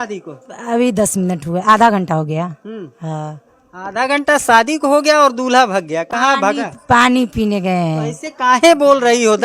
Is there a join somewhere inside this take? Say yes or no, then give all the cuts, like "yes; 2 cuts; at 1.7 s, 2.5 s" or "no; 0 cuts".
no; 0 cuts